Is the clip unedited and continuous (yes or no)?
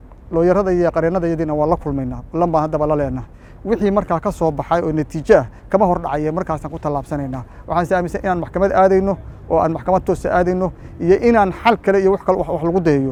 yes